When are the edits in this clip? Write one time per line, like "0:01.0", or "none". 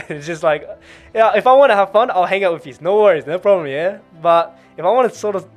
none